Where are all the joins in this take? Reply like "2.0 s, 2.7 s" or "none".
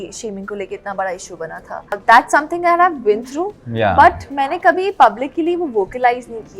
2.0 s